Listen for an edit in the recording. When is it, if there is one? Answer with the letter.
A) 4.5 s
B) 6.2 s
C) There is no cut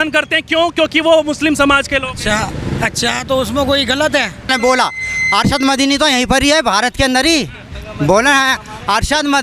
A